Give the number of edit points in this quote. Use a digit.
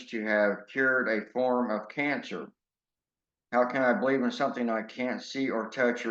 1